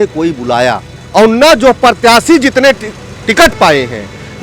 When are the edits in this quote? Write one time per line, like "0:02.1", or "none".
0:00.9